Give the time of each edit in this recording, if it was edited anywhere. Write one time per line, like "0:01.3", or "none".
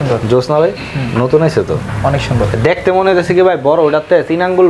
none